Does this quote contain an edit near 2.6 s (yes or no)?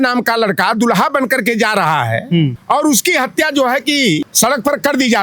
yes